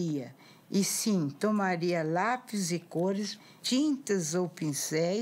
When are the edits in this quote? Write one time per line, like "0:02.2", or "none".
0:03.5